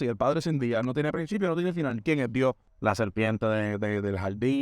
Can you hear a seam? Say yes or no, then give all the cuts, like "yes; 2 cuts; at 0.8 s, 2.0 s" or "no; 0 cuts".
yes; 1 cut; at 2.7 s